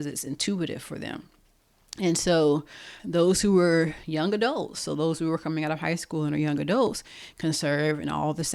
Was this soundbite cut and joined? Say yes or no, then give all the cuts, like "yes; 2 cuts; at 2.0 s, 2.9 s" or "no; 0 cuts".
no; 0 cuts